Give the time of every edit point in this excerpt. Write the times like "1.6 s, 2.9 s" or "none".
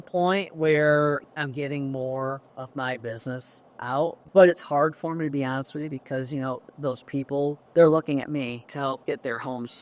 1.2 s, 2.5 s, 4.2 s, 7.6 s, 8.7 s